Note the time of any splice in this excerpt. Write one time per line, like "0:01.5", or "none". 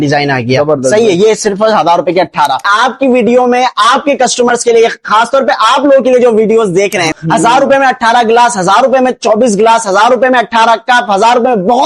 0:02.7
0:07.1

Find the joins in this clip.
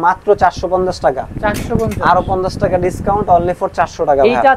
none

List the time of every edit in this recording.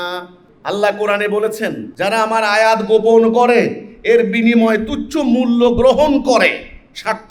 0:01.8

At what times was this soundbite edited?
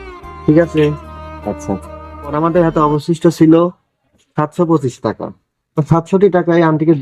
0:02.3

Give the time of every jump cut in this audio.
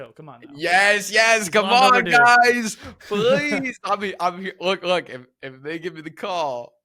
none

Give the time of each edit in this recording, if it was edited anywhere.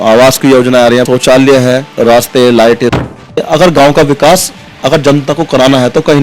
0:01.1
0:01.9
0:03.1

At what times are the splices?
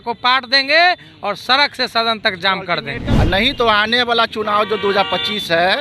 0:03.0

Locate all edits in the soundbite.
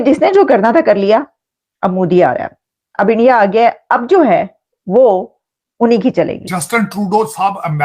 0:06.4

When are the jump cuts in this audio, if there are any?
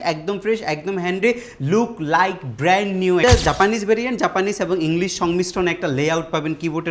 0:03.2

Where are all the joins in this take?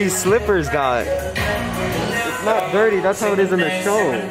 none

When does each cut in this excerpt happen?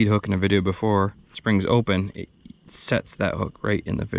0:01.4

